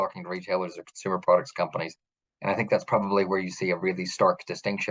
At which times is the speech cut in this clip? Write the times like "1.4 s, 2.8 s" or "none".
none

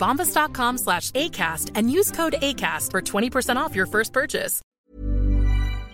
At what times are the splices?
4.7 s

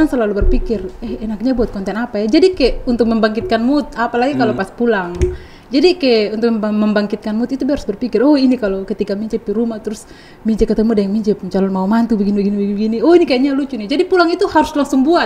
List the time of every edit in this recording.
none

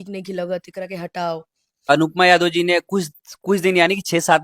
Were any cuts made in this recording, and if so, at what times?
1.9 s

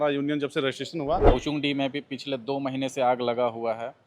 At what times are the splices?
1.3 s

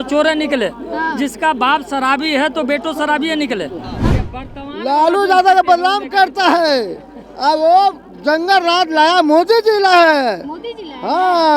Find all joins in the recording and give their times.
3.9 s

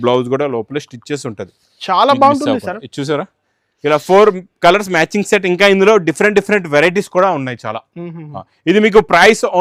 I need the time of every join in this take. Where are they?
none

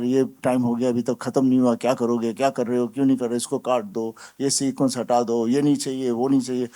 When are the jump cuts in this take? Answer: none

